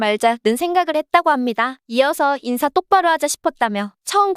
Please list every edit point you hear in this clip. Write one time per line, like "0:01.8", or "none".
0:01.8